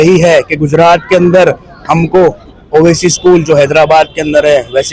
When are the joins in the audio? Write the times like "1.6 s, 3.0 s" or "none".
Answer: none